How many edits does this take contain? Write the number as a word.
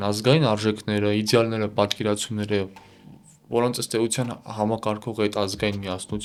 zero